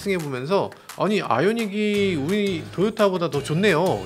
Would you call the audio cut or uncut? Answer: uncut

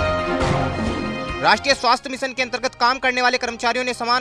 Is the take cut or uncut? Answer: cut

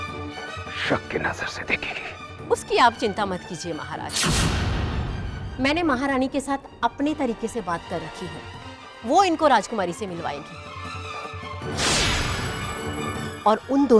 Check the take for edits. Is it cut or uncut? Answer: uncut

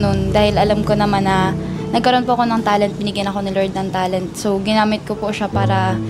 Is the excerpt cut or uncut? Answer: uncut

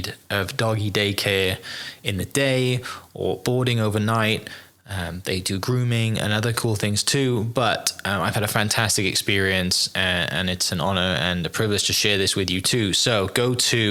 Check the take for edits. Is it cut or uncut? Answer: uncut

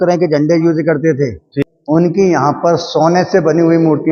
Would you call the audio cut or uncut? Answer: cut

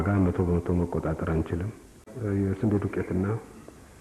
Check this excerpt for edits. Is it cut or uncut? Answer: cut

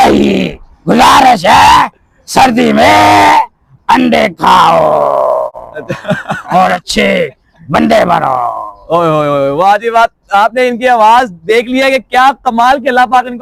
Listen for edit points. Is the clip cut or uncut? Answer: uncut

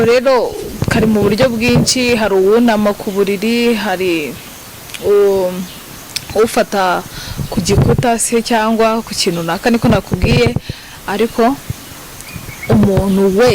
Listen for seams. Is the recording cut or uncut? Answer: uncut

